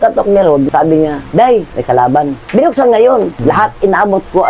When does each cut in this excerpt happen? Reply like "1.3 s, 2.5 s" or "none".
2.4 s, 3.3 s